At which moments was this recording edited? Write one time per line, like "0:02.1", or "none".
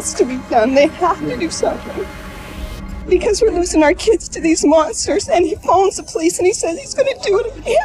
none